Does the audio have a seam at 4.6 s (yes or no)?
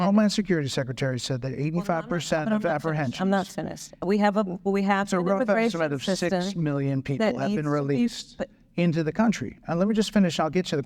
yes